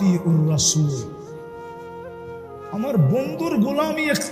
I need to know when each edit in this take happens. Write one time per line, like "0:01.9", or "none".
0:01.0
0:02.6